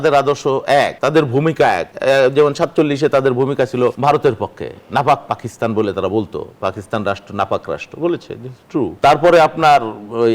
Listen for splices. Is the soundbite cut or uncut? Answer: cut